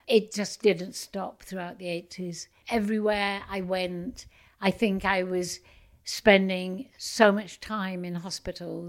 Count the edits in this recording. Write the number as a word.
one